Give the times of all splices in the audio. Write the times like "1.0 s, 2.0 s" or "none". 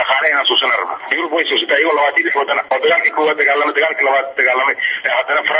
1.0 s, 2.6 s